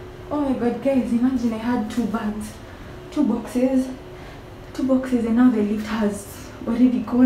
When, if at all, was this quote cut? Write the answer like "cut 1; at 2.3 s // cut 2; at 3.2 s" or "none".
none